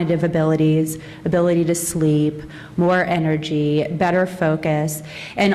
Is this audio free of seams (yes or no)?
no